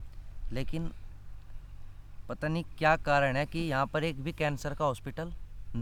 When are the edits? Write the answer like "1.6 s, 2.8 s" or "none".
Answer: none